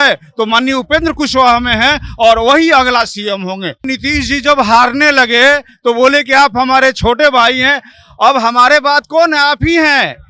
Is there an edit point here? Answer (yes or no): yes